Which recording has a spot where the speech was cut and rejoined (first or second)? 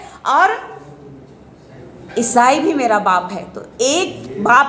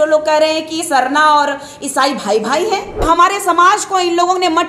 second